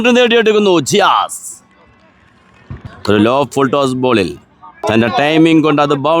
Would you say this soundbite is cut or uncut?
cut